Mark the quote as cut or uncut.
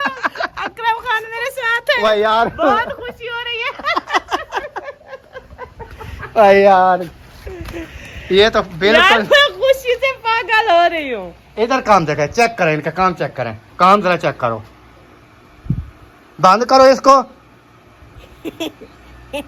uncut